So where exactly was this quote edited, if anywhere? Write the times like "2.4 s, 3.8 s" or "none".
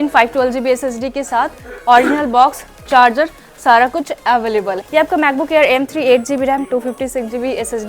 4.8 s